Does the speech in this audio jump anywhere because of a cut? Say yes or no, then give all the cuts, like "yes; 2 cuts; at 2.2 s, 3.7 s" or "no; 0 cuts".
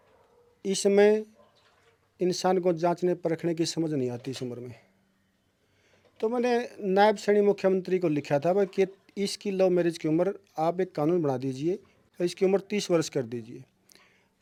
no; 0 cuts